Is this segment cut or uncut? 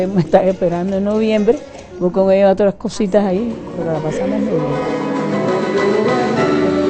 cut